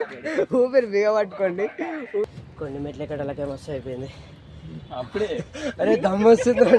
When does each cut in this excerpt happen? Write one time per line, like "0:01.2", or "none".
0:02.2